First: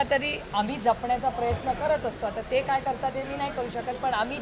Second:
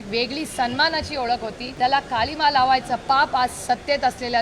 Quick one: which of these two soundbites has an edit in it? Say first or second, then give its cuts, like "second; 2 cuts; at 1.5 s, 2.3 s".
second; 1 cut; at 1.6 s